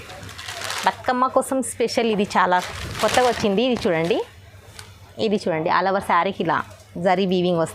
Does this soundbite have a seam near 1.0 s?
no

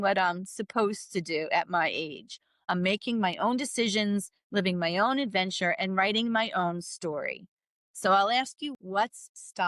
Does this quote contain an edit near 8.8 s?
yes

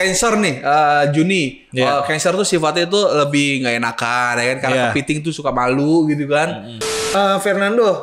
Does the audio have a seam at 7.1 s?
yes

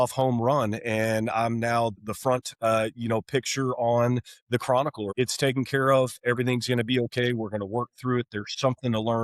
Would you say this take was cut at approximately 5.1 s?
yes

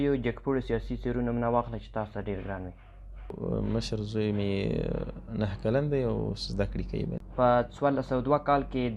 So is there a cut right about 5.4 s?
no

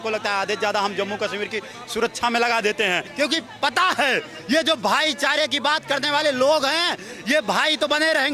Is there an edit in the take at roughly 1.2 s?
no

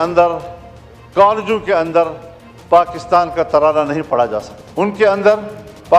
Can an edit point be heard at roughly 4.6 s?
yes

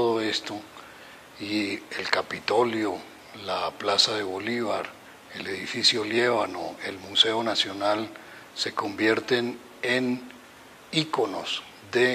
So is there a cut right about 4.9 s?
yes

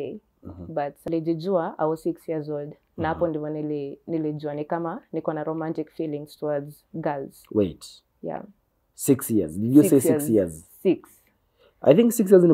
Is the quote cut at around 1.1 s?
yes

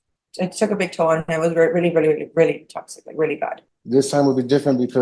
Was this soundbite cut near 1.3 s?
no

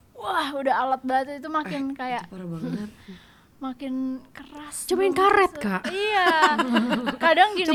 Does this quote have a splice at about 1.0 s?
no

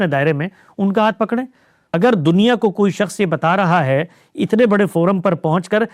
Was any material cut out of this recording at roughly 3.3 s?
no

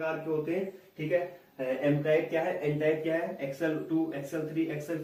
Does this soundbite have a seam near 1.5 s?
no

